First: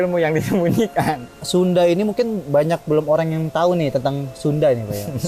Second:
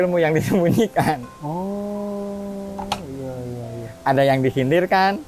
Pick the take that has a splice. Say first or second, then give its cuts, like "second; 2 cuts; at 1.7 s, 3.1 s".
first; 1 cut; at 1.3 s